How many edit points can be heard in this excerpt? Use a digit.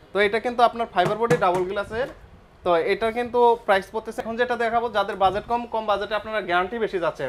1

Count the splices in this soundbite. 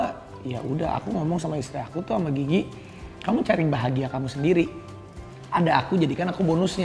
0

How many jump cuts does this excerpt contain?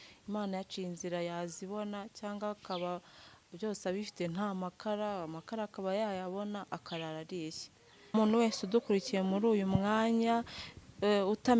1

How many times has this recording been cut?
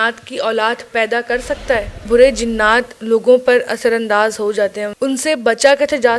2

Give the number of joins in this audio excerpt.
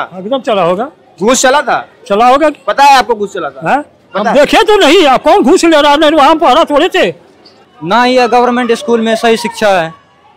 1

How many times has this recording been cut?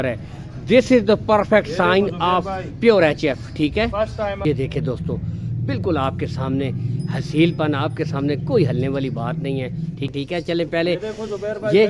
2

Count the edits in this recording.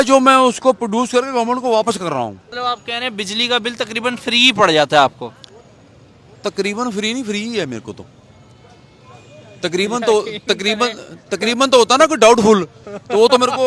1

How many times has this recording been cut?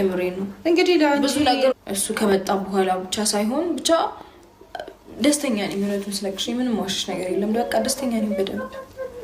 1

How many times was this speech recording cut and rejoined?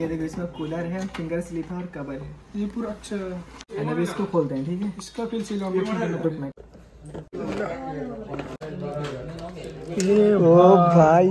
0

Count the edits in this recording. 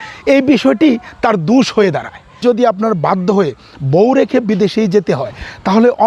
1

